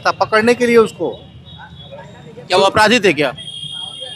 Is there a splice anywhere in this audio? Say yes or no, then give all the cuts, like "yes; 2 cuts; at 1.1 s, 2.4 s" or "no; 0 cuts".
no; 0 cuts